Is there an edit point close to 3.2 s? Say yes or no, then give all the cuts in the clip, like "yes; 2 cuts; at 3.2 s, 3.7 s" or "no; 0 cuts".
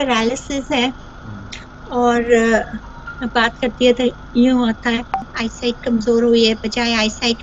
no; 1 cut; at 5.3 s